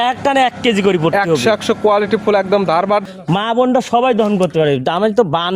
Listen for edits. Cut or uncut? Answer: cut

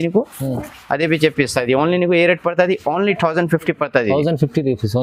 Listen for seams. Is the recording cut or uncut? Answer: uncut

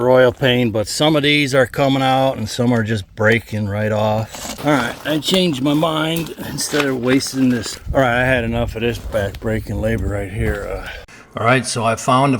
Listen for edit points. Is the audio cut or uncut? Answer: cut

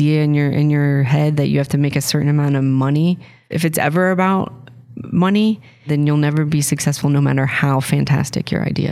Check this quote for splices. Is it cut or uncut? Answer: cut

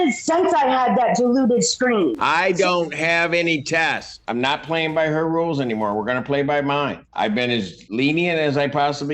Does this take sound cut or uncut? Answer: cut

